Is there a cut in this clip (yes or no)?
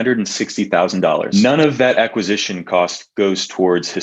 yes